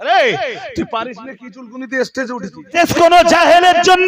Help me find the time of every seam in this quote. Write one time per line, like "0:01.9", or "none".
0:02.8